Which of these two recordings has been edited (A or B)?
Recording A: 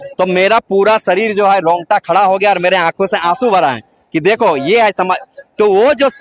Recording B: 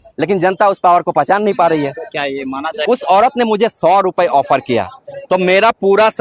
B